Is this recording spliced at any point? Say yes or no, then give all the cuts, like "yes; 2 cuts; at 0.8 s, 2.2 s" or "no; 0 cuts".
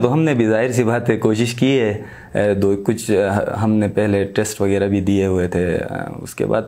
no; 0 cuts